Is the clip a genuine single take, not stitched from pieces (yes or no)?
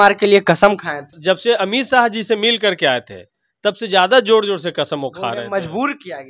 no